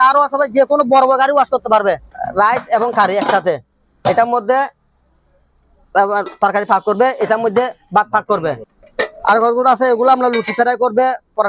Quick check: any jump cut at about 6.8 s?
no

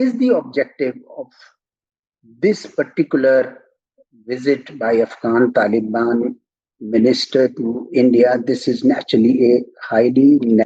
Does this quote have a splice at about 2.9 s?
no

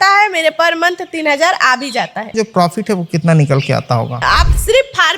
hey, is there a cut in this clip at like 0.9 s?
no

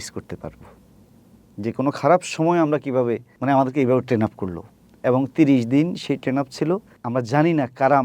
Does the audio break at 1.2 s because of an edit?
no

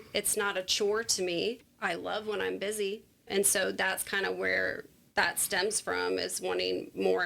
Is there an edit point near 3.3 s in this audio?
yes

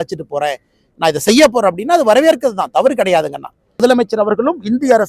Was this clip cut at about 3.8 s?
yes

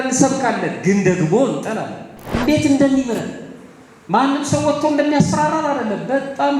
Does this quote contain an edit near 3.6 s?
no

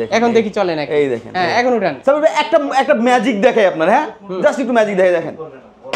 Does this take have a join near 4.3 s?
no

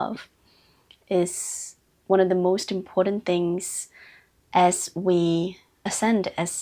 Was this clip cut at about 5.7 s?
yes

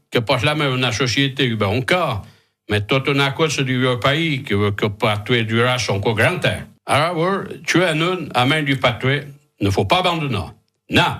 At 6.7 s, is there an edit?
yes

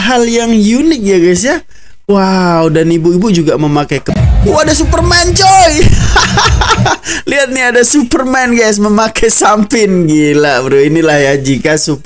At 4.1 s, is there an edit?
yes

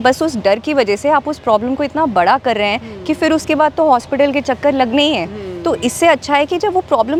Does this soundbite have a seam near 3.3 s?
no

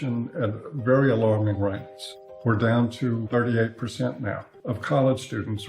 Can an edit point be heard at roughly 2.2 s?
no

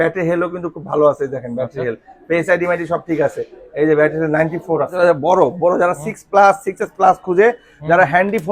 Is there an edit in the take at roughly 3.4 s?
no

